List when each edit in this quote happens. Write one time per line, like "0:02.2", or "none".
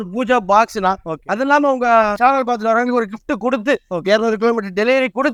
none